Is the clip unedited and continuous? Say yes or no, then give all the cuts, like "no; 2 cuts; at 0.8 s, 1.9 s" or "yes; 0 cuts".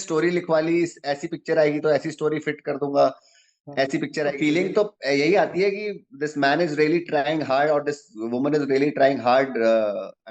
no; 1 cut; at 4.2 s